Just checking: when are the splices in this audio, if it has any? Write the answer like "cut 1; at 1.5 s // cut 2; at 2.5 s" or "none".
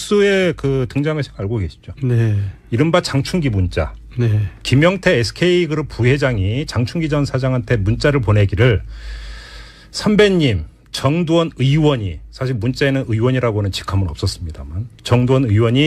cut 1; at 6.3 s